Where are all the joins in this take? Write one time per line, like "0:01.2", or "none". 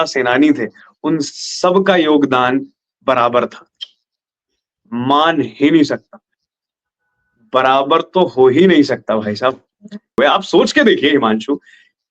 0:10.2